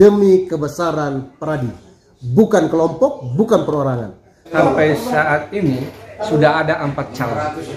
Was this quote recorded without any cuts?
no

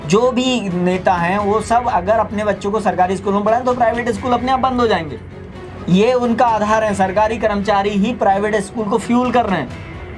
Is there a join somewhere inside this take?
no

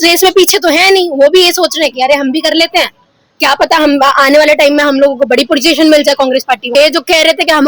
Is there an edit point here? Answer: yes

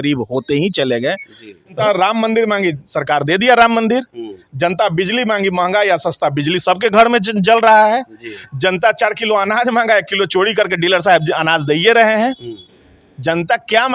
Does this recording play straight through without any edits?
no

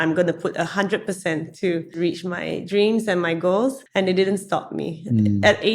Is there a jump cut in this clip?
yes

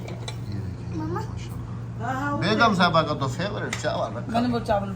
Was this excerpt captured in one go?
yes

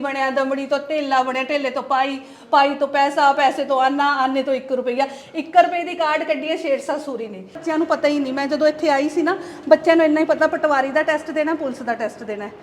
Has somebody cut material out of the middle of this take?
yes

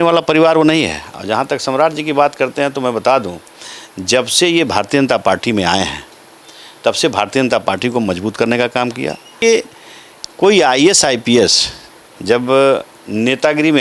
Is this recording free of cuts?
no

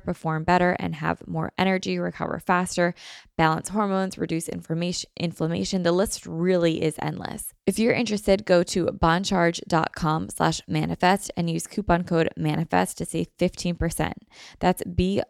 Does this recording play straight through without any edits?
no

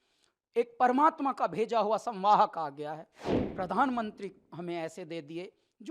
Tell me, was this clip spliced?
yes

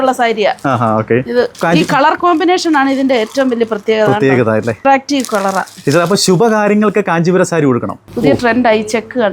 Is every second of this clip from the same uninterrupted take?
no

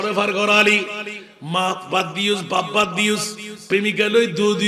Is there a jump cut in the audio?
no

